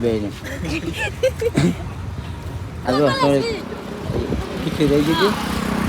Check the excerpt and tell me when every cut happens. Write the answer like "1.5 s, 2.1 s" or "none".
2.9 s